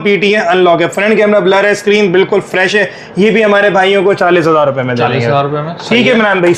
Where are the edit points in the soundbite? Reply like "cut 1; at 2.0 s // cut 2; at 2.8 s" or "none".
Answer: none